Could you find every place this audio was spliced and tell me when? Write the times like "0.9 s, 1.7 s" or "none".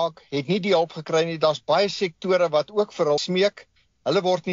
3.2 s